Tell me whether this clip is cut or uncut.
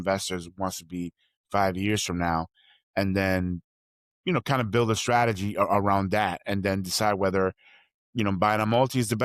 uncut